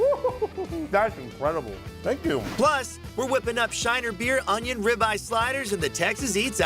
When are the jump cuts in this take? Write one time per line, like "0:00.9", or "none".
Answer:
0:00.9
0:02.8